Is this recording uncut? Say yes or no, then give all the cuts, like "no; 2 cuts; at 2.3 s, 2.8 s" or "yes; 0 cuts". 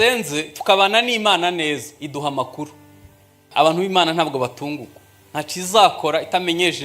no; 1 cut; at 3.5 s